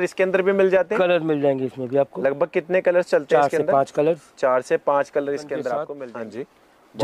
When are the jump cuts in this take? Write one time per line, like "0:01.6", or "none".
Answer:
0:06.0